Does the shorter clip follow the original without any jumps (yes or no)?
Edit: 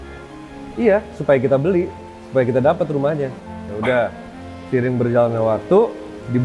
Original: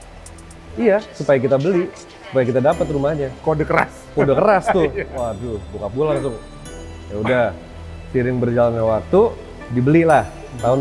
no